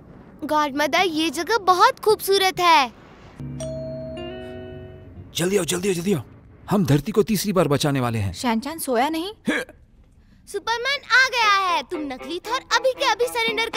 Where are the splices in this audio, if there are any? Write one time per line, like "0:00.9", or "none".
0:03.3
0:04.9